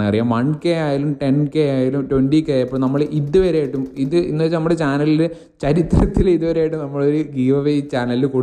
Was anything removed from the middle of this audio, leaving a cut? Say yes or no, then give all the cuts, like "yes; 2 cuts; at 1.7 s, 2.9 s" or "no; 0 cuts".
no; 0 cuts